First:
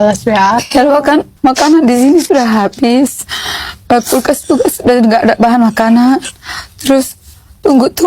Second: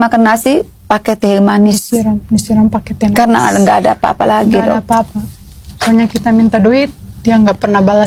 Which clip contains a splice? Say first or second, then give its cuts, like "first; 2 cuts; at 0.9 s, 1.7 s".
first; 1 cut; at 1.3 s